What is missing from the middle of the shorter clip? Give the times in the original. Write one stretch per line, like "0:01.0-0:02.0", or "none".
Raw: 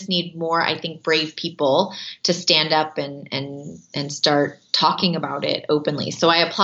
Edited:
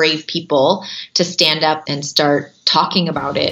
0:02.9-0:03.9